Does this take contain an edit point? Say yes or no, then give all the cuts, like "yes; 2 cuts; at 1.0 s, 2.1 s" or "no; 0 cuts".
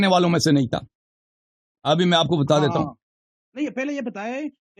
no; 0 cuts